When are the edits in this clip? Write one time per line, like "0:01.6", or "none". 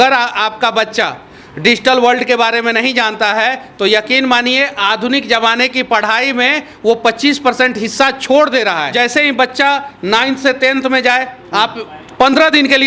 0:08.9